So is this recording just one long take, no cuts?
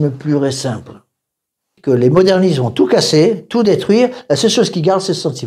no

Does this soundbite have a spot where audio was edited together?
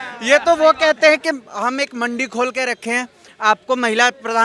no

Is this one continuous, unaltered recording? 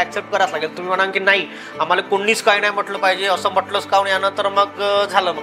yes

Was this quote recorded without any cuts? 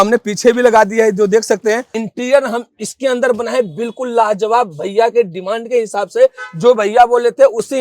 no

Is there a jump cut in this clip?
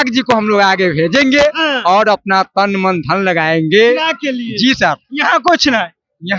no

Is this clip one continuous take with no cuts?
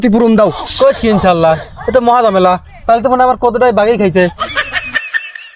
yes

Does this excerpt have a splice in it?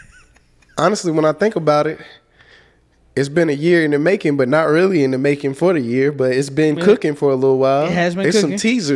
no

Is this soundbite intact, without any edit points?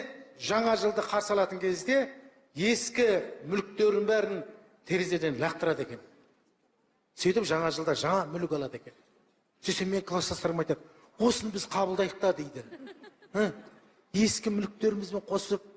no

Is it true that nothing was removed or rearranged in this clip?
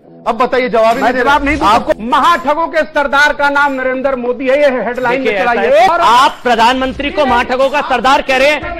no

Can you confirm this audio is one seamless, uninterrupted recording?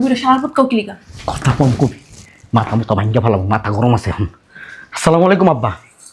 yes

